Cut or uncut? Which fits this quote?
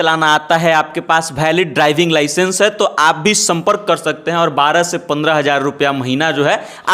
uncut